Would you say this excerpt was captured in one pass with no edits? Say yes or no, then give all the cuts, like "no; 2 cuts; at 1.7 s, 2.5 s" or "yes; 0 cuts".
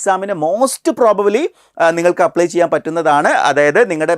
yes; 0 cuts